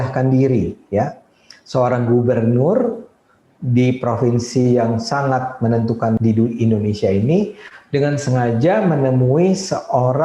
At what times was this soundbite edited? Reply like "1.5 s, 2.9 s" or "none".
6.2 s